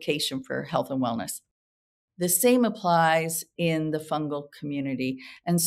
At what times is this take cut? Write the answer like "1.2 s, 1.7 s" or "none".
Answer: none